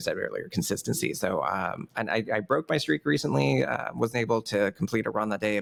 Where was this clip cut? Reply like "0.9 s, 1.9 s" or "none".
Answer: none